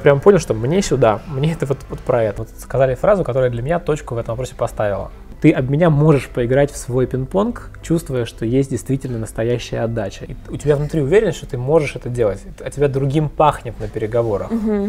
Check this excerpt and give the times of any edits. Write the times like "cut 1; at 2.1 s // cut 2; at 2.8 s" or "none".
cut 1; at 2.4 s // cut 2; at 5.3 s // cut 3; at 10.2 s